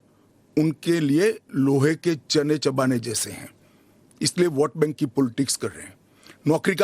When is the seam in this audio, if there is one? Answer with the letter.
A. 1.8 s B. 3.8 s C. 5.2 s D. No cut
C